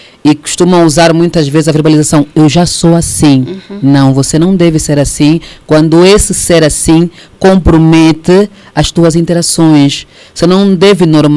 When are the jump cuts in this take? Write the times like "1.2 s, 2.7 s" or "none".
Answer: none